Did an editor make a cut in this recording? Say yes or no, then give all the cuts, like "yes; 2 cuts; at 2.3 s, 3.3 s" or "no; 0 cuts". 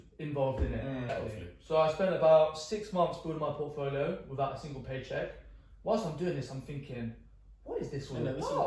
yes; 1 cut; at 1.1 s